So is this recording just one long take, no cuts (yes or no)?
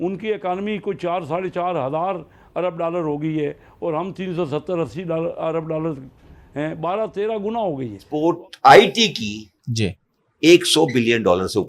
no